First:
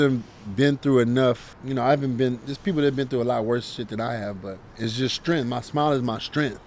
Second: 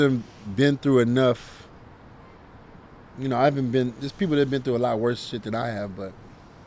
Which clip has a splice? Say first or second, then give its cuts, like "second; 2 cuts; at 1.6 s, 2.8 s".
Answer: first; 2 cuts; at 1.5 s, 4.6 s